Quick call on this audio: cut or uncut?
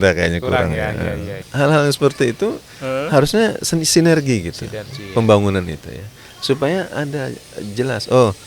cut